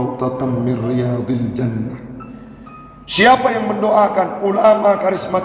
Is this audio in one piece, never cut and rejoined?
yes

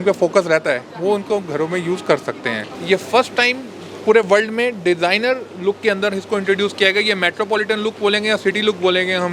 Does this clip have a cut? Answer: yes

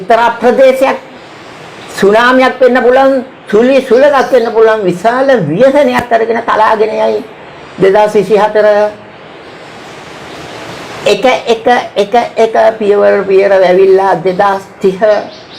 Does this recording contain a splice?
no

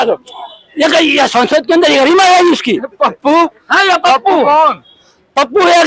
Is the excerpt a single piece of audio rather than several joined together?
yes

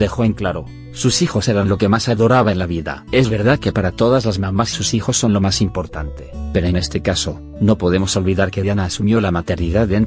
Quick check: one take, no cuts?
no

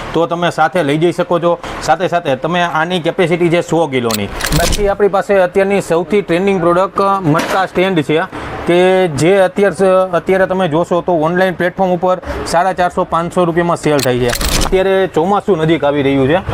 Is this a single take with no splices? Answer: no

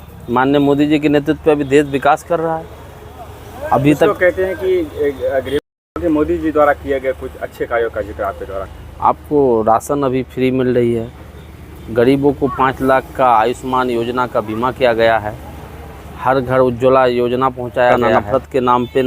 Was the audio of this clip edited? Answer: yes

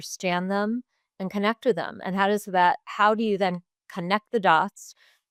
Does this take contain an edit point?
no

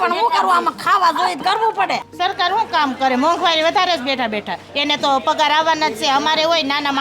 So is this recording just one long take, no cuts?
no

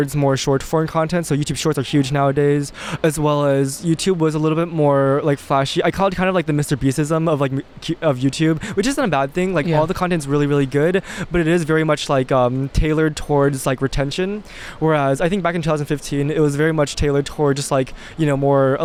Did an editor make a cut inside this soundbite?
no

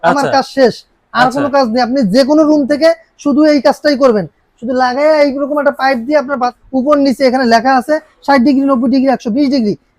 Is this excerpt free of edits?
no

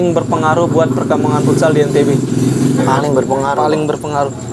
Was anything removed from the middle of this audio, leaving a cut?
no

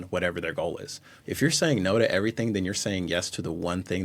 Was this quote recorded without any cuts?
no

